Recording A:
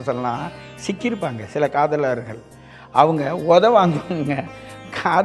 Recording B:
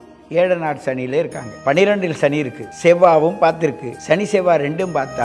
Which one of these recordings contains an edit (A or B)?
B